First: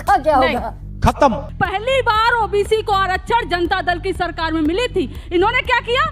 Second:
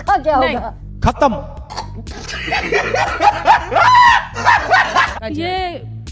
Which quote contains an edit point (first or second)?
first